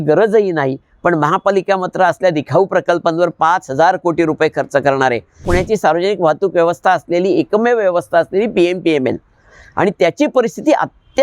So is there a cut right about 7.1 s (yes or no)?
no